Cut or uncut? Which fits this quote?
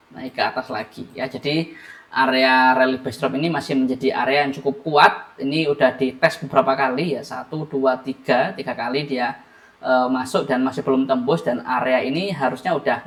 uncut